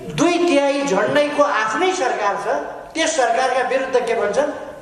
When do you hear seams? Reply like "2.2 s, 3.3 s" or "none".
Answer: none

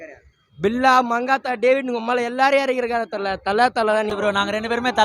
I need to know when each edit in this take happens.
4.1 s

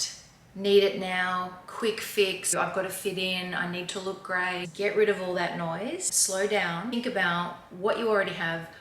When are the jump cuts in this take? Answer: 2.5 s, 4.7 s, 6.1 s, 6.9 s

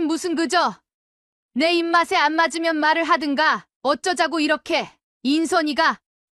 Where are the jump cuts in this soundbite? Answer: 5.0 s

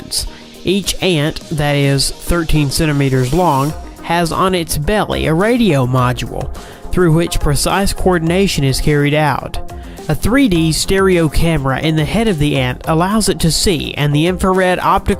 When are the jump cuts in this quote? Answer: none

